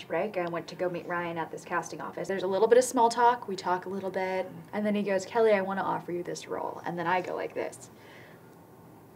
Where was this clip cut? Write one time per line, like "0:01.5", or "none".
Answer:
0:02.3
0:04.6